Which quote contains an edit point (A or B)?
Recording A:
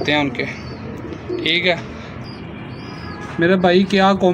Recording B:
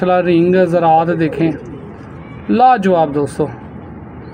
A